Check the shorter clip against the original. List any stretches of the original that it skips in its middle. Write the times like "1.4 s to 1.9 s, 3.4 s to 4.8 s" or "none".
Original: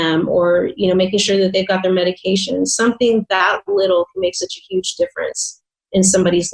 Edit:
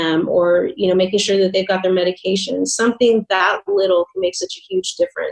none